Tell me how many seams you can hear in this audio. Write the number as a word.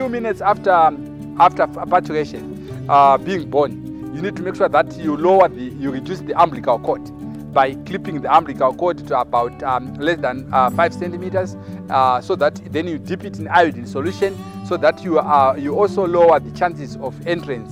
zero